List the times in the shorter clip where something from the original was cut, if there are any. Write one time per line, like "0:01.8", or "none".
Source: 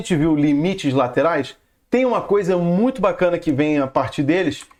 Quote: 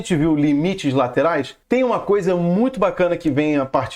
0:01.5